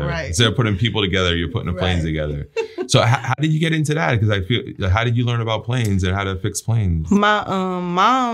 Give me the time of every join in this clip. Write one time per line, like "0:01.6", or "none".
none